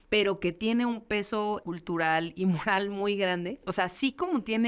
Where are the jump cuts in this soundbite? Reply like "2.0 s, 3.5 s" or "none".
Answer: 1.6 s, 3.6 s